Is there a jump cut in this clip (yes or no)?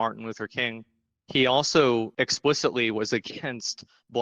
yes